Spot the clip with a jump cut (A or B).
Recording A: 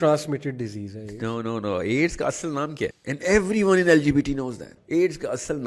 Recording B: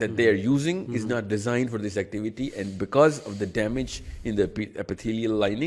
A